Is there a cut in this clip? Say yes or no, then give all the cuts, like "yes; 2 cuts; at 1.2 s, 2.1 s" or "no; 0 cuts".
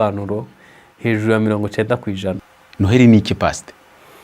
yes; 1 cut; at 2.4 s